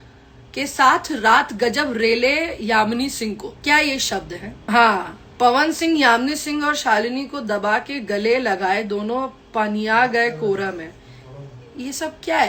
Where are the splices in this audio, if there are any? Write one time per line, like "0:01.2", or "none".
0:03.5
0:04.6